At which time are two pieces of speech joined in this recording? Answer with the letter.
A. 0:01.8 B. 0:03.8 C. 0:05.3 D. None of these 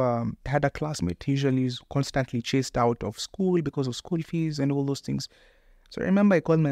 D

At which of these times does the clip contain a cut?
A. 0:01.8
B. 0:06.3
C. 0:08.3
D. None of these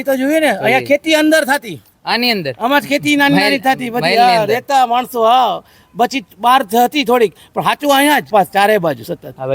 C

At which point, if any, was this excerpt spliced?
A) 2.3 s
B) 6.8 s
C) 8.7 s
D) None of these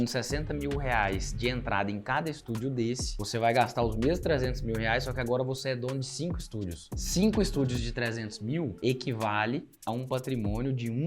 C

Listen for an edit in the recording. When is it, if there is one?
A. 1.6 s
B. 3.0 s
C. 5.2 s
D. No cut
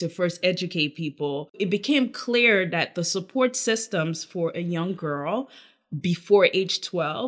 A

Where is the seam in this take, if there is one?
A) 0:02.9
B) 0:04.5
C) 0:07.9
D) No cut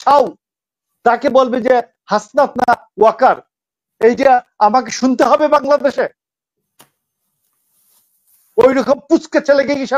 D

